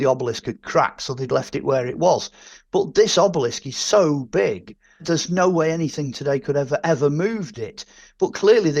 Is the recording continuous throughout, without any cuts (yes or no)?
no